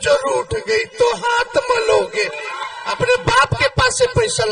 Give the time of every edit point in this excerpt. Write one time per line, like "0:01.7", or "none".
0:02.6